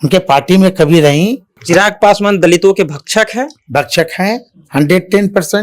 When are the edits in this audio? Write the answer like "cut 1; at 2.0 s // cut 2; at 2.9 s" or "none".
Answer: cut 1; at 1.5 s

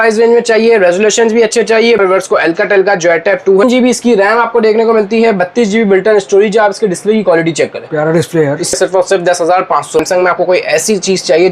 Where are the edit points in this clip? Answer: cut 1; at 2.0 s // cut 2; at 3.6 s // cut 3; at 8.8 s // cut 4; at 10.0 s

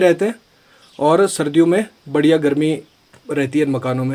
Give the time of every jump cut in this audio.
none

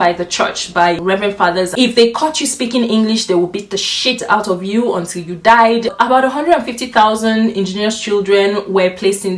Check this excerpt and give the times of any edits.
cut 1; at 1.7 s // cut 2; at 5.9 s

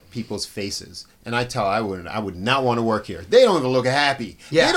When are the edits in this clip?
none

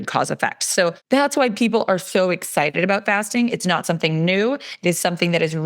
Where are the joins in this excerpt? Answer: cut 1; at 1.0 s

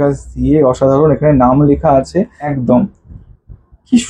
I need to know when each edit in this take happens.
cut 1; at 2.4 s

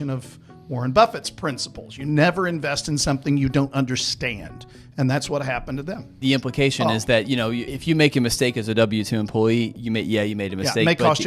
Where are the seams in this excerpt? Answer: cut 1; at 6.1 s // cut 2; at 7.7 s // cut 3; at 9.8 s

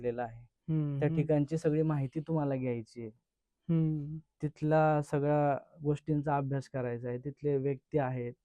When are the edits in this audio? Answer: none

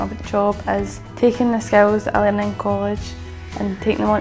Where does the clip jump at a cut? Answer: cut 1; at 1.0 s

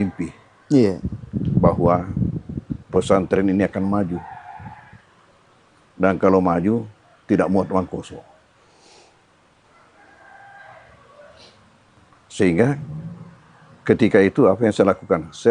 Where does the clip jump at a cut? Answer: cut 1; at 8.3 s

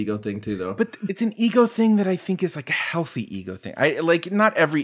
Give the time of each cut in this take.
cut 1; at 1.0 s

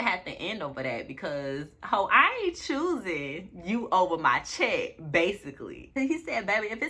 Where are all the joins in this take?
cut 1; at 6.0 s

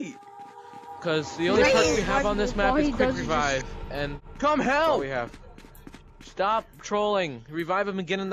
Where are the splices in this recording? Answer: cut 1; at 4.2 s

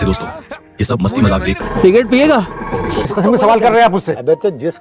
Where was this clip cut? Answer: cut 1; at 1.6 s // cut 2; at 3.0 s

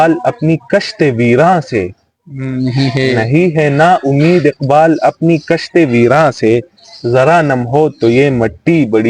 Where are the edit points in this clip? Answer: none

